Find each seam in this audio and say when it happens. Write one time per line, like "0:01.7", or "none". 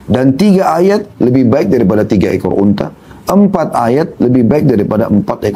none